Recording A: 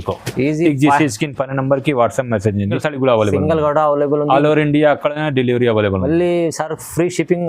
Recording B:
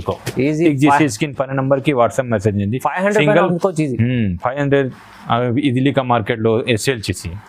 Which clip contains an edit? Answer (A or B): A